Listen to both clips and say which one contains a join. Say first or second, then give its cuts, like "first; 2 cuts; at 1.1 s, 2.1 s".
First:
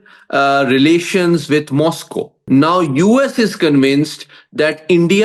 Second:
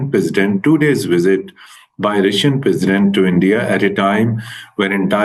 first; 1 cut; at 2.4 s